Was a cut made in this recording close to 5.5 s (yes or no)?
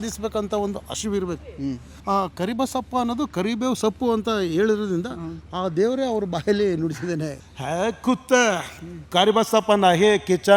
no